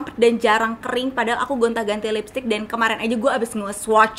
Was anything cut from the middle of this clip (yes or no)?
no